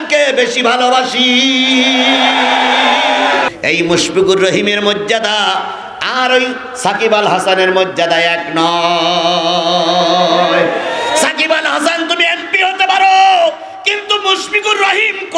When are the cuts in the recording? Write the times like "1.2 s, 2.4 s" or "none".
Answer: 3.5 s